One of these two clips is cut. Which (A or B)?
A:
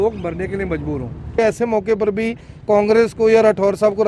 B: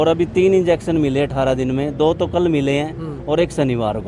A